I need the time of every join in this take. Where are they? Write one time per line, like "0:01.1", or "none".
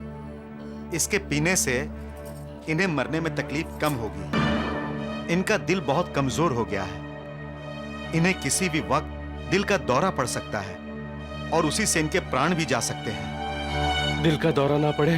0:04.3